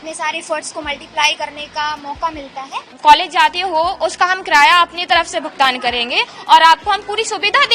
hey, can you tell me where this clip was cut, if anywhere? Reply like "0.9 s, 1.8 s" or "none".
2.9 s